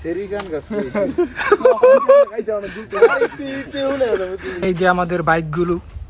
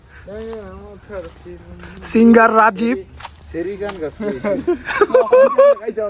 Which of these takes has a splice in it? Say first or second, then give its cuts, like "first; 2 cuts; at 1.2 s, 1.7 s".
first; 1 cut; at 4.5 s